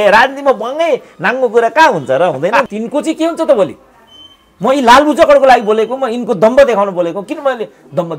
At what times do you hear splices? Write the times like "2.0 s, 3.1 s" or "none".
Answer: 2.7 s